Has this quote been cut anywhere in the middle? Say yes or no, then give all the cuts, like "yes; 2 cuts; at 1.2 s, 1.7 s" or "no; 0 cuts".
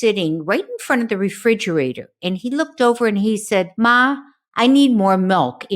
yes; 1 cut; at 3.7 s